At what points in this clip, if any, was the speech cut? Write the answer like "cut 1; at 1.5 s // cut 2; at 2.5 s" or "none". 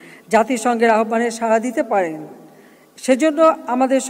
none